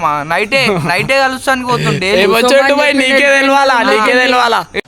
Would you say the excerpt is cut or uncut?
uncut